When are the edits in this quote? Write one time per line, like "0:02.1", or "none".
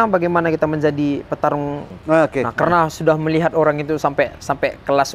0:01.9